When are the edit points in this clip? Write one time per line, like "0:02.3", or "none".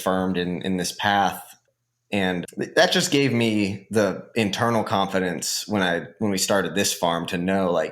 none